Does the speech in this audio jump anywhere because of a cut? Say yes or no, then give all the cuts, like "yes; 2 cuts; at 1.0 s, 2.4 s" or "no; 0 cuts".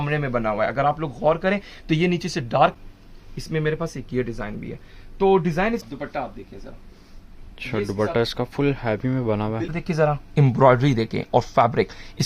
yes; 3 cuts; at 2.7 s, 5.8 s, 9.8 s